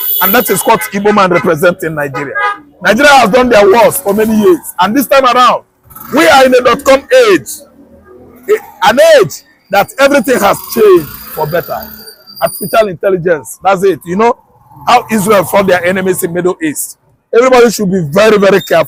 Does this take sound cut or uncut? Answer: uncut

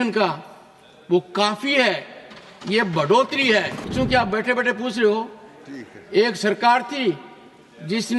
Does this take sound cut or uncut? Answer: cut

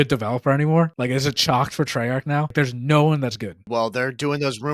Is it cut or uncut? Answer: cut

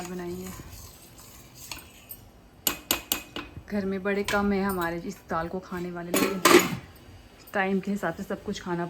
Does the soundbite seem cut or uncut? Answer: uncut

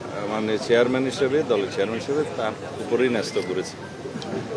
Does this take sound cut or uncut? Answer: uncut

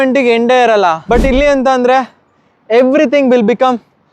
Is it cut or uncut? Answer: cut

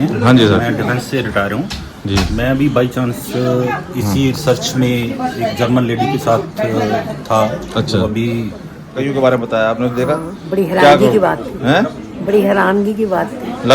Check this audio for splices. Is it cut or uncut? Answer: cut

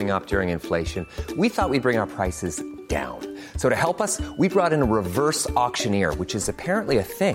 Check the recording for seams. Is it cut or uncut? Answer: uncut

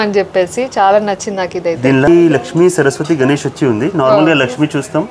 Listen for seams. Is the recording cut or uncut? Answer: cut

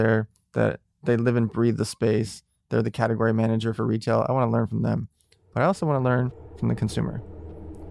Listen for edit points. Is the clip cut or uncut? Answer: uncut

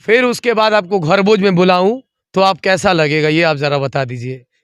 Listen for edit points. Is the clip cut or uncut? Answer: uncut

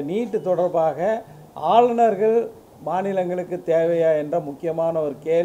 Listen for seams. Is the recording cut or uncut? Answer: uncut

